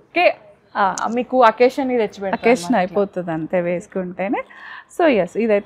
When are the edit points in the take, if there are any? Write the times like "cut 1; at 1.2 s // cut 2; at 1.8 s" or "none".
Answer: none